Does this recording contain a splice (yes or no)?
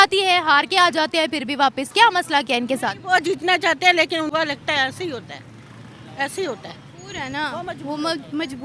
yes